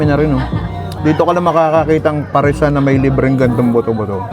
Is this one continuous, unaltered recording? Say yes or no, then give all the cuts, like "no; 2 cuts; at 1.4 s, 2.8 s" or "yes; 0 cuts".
no; 1 cut; at 0.9 s